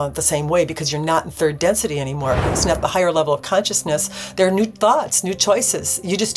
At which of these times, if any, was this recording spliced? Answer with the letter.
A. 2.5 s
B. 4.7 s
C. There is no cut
A